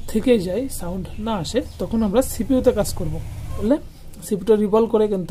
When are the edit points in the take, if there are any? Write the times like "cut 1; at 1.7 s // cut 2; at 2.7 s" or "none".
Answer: cut 1; at 3.6 s